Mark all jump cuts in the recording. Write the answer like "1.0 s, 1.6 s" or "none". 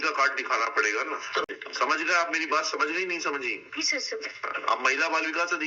1.5 s